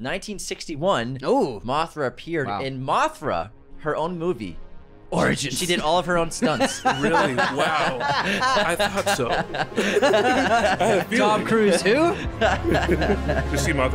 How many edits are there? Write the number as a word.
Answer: zero